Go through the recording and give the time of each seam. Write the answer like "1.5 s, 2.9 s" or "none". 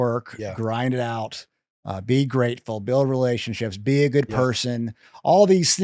none